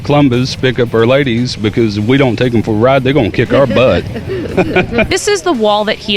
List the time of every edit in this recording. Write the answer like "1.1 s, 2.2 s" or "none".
5.1 s